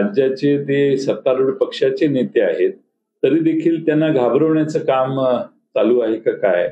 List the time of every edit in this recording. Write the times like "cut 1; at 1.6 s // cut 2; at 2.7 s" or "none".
none